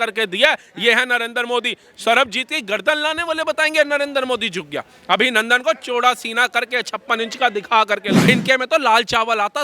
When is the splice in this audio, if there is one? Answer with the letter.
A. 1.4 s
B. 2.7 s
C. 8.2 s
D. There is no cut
C